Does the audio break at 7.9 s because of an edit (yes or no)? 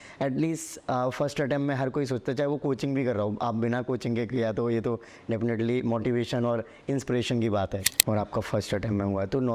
yes